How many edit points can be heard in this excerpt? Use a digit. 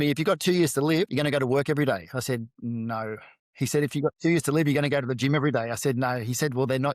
1